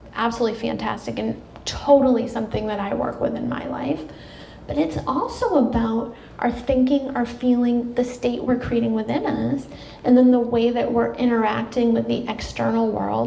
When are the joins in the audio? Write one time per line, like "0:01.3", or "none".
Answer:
0:01.6

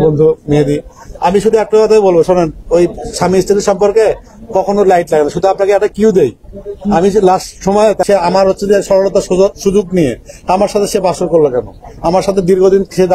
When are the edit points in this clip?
0:08.0

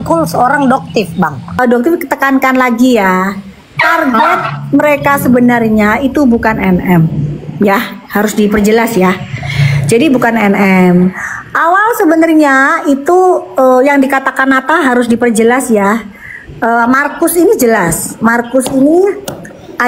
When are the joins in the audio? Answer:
0:01.6

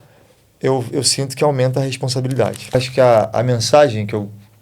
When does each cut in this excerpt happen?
0:02.7

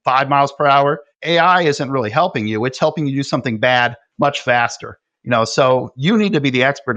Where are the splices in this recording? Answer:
0:04.0
0:05.9

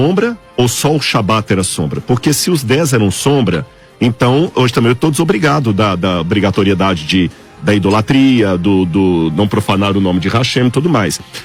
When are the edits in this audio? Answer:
none

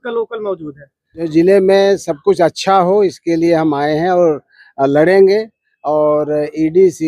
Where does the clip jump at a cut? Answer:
0:01.3

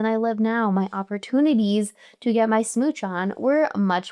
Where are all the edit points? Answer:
none

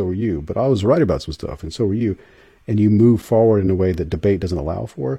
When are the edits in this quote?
none

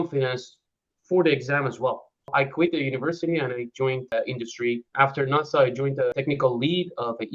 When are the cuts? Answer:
0:02.3
0:04.3
0:06.1

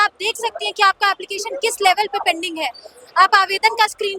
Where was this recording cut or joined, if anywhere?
none

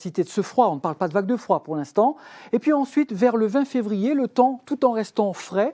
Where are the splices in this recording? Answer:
0:04.3

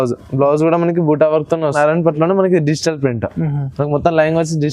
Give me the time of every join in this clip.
0:01.7

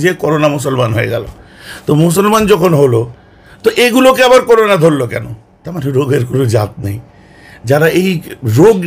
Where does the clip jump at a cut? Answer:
none

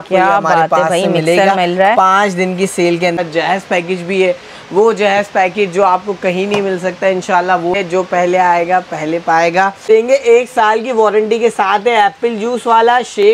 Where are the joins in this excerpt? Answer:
0:03.2
0:07.7
0:09.9

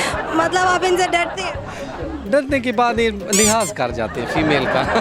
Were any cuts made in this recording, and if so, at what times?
0:03.2

